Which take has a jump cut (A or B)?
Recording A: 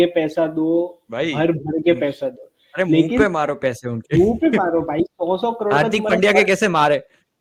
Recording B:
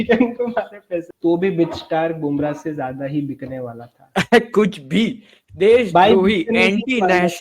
B